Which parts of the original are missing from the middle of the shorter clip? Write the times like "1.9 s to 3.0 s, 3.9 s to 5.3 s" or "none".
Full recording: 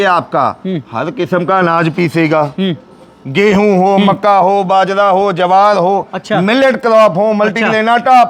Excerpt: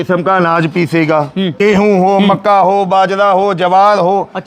2.6 s to 3.2 s